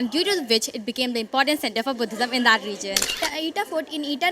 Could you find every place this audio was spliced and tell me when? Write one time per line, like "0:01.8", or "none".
0:03.2